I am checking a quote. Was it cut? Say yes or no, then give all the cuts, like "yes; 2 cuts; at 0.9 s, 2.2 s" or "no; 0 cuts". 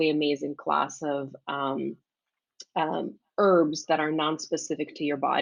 no; 0 cuts